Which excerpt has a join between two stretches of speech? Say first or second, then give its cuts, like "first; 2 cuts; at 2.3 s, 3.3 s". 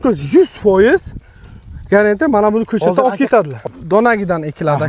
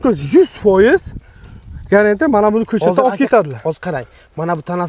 first; 1 cut; at 3.7 s